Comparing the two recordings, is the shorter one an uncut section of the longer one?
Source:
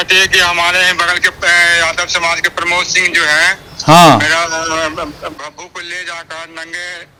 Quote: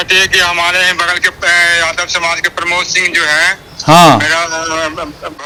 yes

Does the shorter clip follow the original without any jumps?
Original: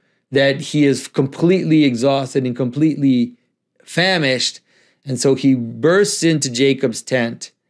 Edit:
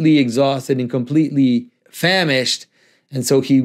no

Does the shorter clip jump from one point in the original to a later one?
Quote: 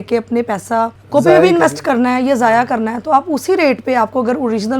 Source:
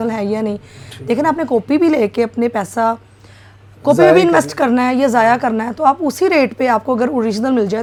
yes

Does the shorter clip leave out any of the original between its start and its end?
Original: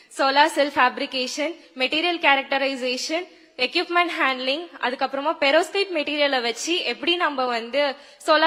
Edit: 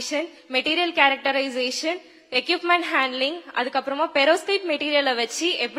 no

